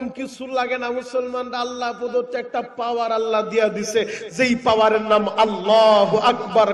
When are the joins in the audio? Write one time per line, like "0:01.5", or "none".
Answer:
none